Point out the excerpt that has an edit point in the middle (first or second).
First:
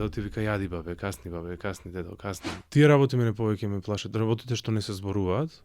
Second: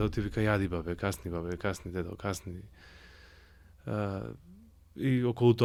first